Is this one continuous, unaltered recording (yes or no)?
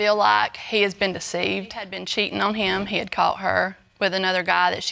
no